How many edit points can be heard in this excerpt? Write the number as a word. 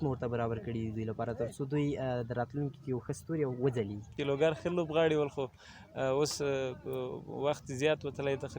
one